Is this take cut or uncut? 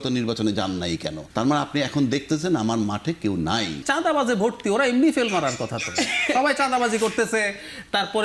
cut